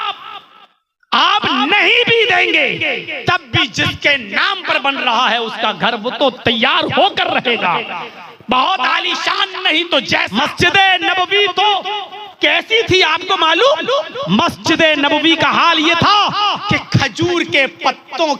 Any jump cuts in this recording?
yes; 1 cut; at 10.4 s

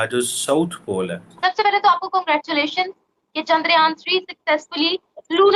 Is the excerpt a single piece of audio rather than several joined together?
no; 1 cut; at 1.2 s

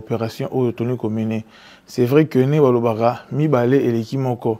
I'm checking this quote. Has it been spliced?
no; 0 cuts

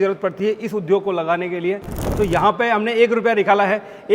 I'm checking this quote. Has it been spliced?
yes; 1 cut; at 2.0 s

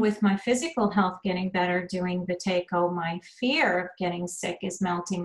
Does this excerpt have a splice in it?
no; 0 cuts

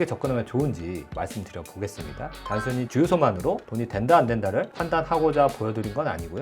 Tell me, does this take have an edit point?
yes; 1 cut; at 2.4 s

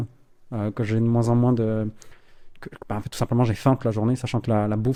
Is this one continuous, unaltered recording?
yes; 0 cuts

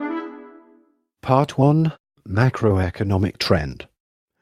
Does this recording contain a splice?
yes; 1 cut; at 1.6 s

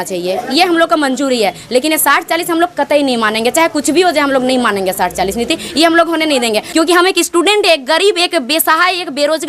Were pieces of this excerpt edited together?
yes; 1 cut; at 6.6 s

